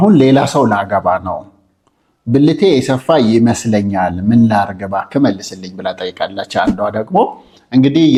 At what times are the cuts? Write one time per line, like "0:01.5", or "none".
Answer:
none